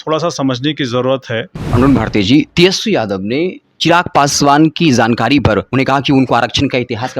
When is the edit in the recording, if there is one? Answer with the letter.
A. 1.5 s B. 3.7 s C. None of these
A